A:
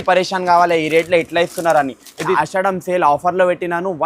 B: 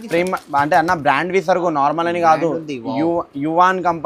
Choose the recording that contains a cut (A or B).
A